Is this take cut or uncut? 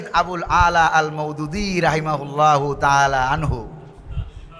uncut